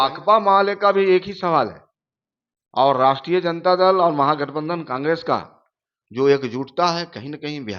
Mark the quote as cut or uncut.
uncut